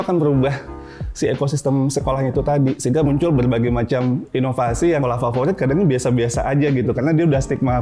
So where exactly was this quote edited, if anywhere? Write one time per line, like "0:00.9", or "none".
0:03.1
0:05.0